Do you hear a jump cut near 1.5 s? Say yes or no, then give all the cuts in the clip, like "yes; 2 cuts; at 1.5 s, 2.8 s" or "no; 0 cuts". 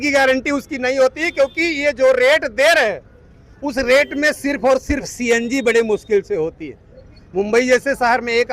no; 0 cuts